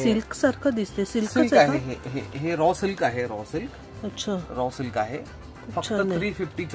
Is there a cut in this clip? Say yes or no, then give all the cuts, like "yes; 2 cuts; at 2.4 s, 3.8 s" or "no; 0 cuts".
no; 0 cuts